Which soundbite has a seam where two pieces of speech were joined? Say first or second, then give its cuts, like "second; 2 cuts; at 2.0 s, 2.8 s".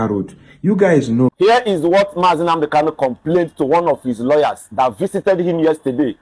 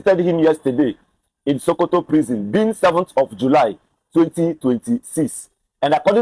first; 1 cut; at 1.3 s